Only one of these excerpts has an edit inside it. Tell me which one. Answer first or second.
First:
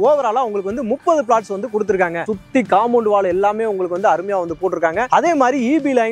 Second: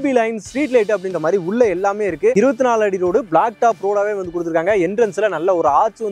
second